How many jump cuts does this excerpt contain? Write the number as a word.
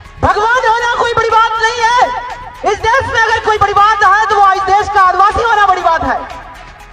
one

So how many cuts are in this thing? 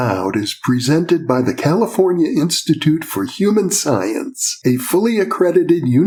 zero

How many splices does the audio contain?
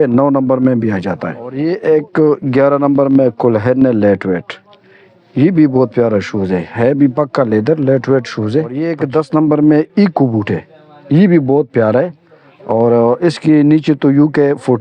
two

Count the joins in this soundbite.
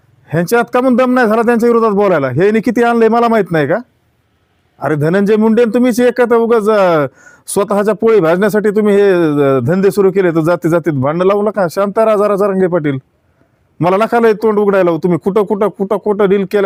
zero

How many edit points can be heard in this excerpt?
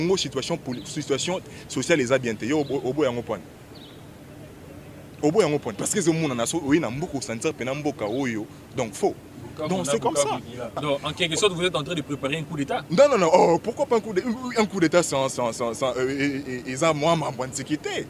one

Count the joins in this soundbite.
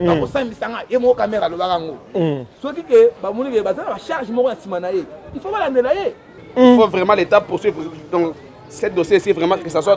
one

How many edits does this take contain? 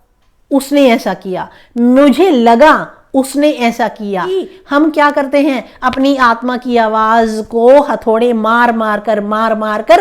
one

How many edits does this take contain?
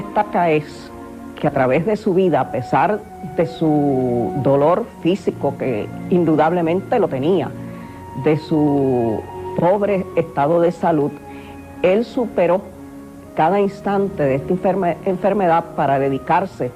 one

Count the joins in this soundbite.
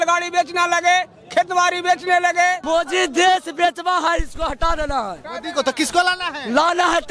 one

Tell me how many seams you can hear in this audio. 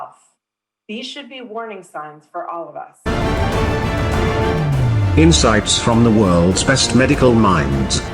one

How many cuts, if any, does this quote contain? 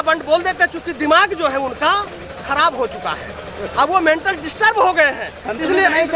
zero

